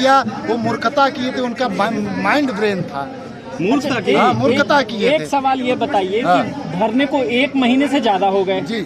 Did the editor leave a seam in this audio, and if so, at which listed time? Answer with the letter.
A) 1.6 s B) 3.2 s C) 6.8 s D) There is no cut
D